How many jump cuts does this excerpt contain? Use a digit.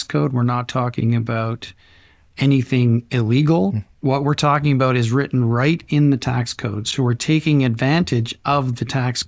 2